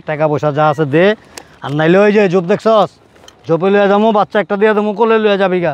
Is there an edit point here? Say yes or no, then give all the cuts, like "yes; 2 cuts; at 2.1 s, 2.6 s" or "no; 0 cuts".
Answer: no; 0 cuts